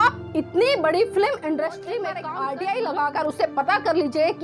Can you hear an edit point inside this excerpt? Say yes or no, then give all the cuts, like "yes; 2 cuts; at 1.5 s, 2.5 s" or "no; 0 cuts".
yes; 1 cut; at 2.2 s